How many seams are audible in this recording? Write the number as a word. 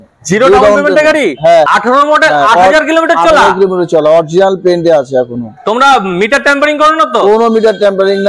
one